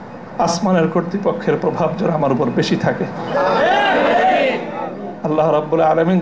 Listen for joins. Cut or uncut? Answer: uncut